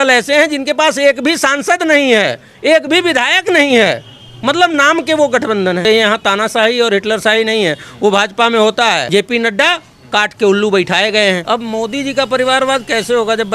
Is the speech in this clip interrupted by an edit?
yes; 3 cuts; at 5.8 s, 9.0 s, 11.4 s

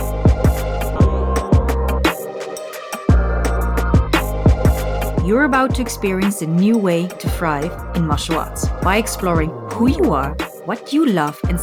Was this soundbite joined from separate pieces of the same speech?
yes; 1 cut; at 0.9 s

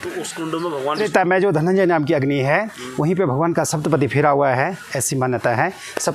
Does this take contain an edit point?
yes; 1 cut; at 1.1 s

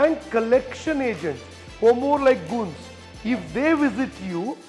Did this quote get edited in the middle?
no; 0 cuts

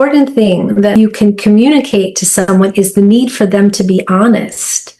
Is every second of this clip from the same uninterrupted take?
no; 1 cut; at 0.9 s

